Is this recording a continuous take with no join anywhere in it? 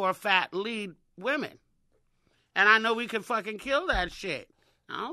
yes; 0 cuts

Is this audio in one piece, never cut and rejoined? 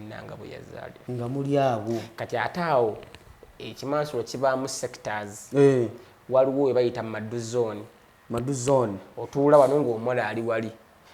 no; 1 cut; at 1.0 s

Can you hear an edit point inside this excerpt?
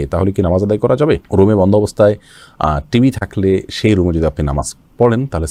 no; 0 cuts

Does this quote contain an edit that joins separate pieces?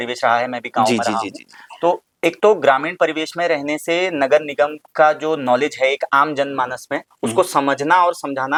no; 0 cuts

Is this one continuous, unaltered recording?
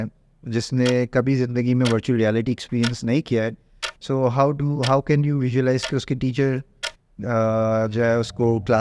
yes; 0 cuts

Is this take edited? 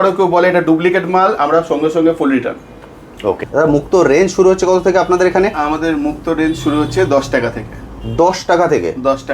yes; 1 cut; at 3.4 s

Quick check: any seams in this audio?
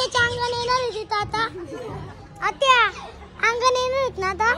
no; 0 cuts

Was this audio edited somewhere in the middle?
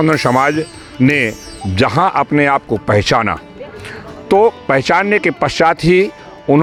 no; 0 cuts

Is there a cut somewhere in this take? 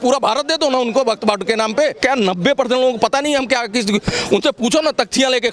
yes; 1 cut; at 2.0 s

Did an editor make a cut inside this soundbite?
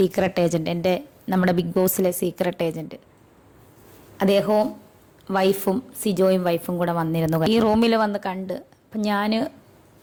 no; 0 cuts

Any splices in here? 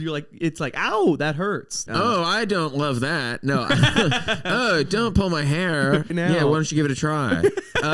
yes; 2 cuts; at 1.8 s, 6.1 s

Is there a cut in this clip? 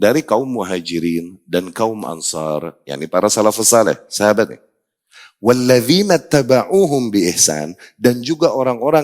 no; 0 cuts

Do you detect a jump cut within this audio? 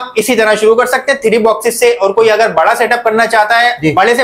no; 0 cuts

